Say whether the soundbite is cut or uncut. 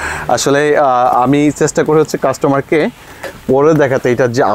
uncut